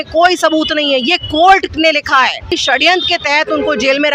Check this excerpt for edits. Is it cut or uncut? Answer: cut